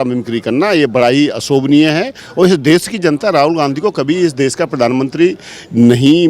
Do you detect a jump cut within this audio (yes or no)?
yes